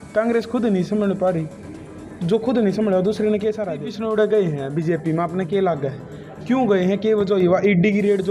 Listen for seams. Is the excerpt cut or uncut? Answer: cut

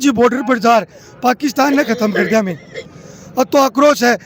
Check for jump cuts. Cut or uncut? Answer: uncut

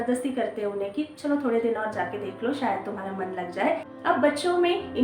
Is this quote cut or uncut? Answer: cut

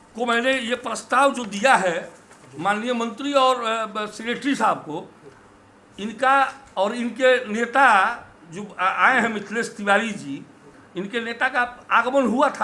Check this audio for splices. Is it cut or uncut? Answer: uncut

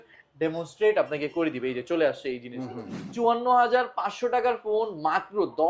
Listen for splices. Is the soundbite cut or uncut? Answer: cut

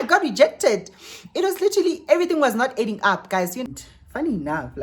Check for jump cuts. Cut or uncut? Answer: cut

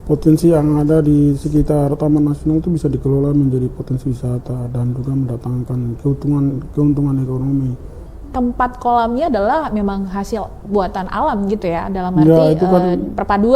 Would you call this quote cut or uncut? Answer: cut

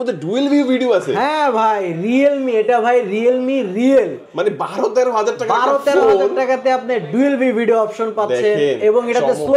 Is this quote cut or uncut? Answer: uncut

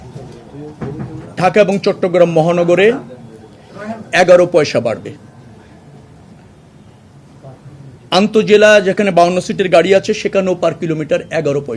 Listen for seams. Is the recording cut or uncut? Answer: uncut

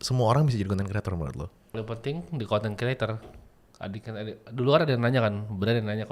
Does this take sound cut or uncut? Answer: cut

